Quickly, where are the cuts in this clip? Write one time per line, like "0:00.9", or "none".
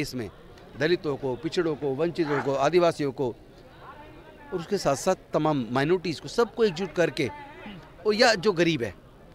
none